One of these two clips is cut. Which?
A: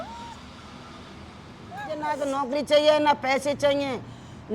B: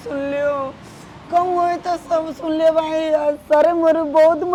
A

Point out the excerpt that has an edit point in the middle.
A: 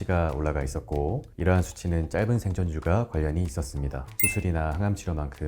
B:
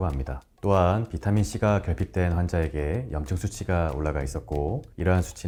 A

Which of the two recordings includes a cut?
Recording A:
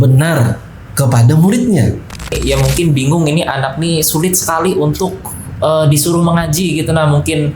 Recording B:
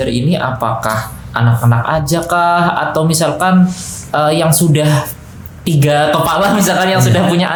A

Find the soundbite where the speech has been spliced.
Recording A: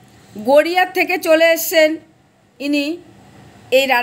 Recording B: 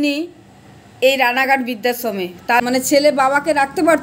B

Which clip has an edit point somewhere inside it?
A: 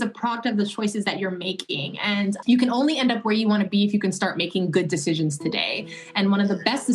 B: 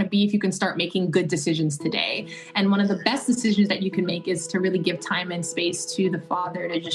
A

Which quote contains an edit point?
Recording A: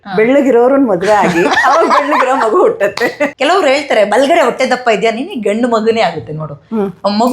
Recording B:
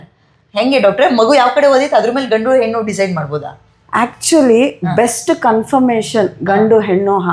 A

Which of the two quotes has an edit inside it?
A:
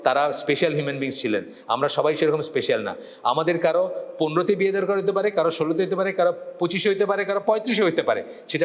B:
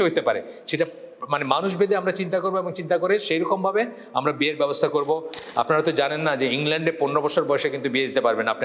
B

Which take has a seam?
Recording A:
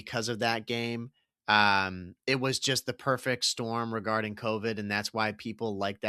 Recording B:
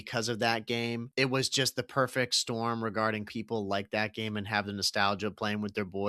B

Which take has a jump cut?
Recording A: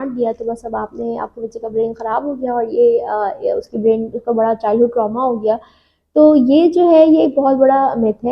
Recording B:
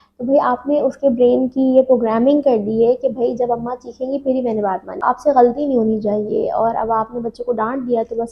B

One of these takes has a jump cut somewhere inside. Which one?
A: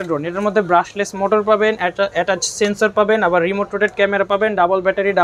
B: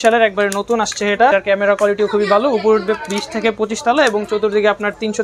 B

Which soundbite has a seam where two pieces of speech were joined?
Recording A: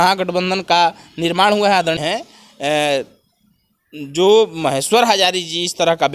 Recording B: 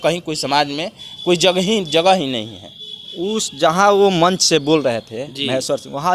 A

